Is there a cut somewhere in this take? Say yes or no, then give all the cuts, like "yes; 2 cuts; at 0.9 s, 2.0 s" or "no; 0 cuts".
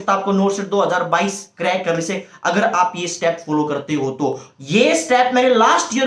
no; 0 cuts